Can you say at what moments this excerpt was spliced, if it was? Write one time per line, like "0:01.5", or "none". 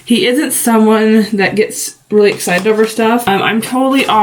0:03.2